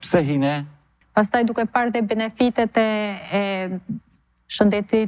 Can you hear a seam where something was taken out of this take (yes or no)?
yes